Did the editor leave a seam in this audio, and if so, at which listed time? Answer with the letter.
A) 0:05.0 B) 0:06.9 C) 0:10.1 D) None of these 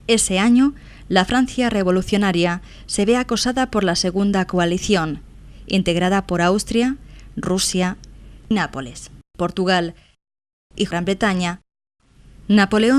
D